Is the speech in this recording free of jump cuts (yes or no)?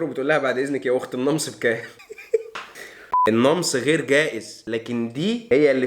no